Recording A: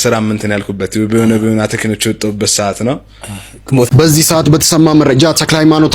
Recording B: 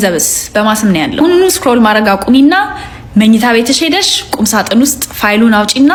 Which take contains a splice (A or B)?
A